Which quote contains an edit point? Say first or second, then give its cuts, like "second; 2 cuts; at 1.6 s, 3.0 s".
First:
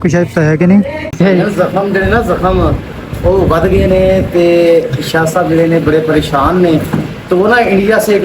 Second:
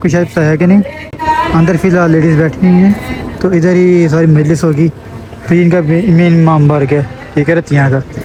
first; 1 cut; at 1.1 s